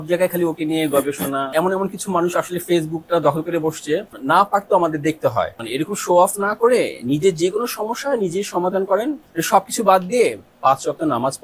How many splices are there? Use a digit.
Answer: 4